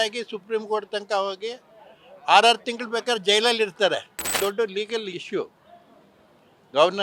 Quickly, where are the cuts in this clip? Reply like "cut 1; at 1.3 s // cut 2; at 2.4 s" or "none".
cut 1; at 4.3 s